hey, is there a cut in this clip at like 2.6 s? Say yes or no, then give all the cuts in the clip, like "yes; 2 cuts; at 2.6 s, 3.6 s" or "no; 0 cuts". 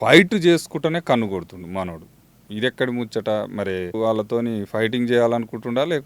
no; 1 cut; at 3.9 s